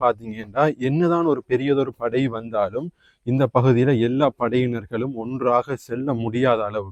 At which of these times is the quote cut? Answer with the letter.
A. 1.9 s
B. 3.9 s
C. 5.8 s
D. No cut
D